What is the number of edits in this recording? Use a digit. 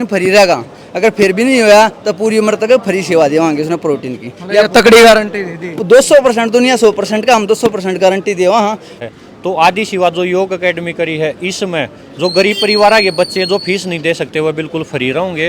1